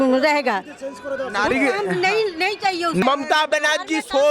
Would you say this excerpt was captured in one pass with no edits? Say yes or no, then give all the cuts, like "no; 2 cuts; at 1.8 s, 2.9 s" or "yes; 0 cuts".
no; 1 cut; at 3.0 s